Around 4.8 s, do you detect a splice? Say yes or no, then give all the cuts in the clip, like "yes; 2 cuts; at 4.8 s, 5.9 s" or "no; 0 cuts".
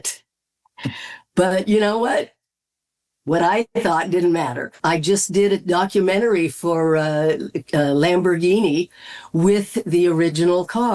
yes; 1 cut; at 4.8 s